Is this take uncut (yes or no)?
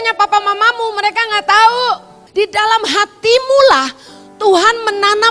no